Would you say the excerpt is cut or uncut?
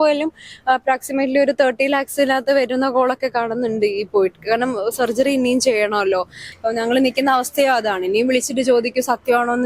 cut